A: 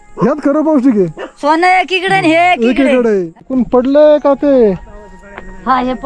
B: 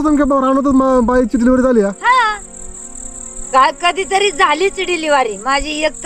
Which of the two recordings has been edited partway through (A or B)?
A